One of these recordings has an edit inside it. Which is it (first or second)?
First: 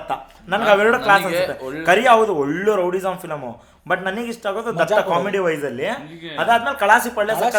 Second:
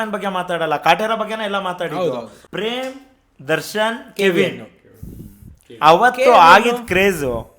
second